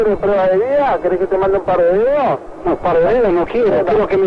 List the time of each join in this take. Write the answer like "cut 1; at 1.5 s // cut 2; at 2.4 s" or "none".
none